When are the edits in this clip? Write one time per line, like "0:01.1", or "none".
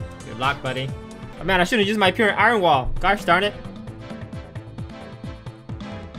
0:01.3